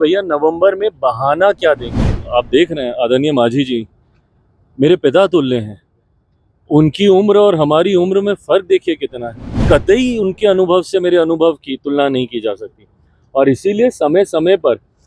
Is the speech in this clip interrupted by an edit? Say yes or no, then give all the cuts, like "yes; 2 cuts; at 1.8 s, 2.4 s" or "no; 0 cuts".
yes; 1 cut; at 2.1 s